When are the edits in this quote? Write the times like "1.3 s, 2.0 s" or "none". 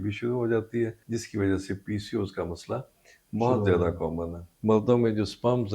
1.0 s, 4.5 s

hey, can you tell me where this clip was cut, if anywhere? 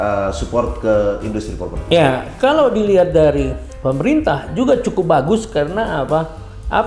3.6 s

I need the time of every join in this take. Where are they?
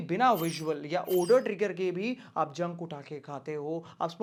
none

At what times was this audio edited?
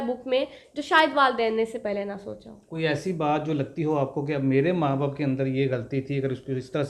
none

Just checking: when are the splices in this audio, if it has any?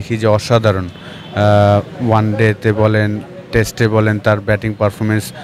none

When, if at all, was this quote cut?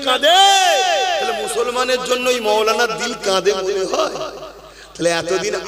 none

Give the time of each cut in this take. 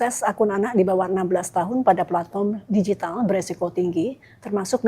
none

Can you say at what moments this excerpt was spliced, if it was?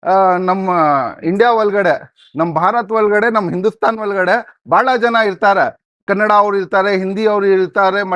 none

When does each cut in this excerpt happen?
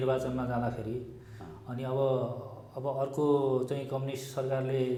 none

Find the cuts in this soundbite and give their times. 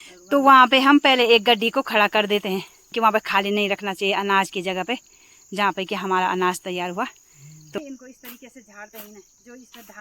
2.9 s, 7.8 s

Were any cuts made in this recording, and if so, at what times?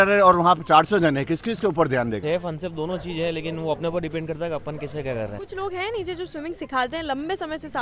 2.2 s, 5.4 s

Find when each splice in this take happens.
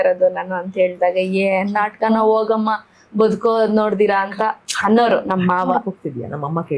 none

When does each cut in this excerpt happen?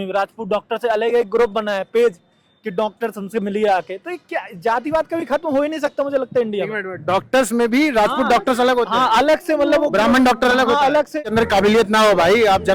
11.2 s

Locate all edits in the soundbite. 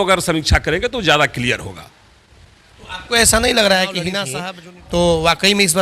4.3 s

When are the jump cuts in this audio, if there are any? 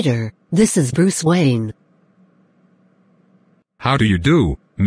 1.8 s, 3.7 s

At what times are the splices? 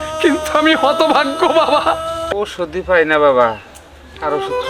2.1 s

